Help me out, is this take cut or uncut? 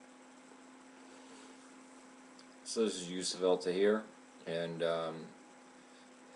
uncut